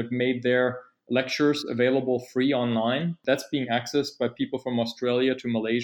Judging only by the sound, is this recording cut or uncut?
uncut